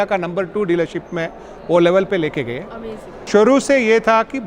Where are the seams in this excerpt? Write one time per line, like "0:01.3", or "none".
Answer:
0:03.2